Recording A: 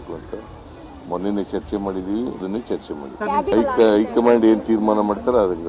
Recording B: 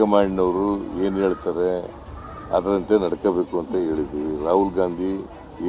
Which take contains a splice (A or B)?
A